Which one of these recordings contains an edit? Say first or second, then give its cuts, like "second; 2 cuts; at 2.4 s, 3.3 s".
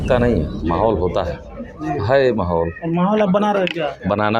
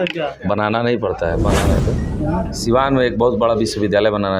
second; 1 cut; at 1.8 s